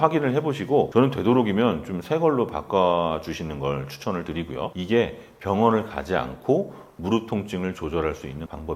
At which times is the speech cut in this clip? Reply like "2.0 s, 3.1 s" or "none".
4.7 s